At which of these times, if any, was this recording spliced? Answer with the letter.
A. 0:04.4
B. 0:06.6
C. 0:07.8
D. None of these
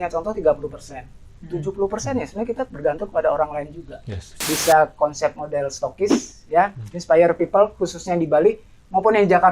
A